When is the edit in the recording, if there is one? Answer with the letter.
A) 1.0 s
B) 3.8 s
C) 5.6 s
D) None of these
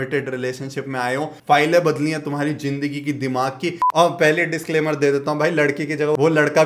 B